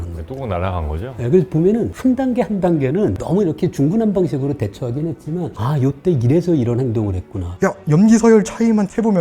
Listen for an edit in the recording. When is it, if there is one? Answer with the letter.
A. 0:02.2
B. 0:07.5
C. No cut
B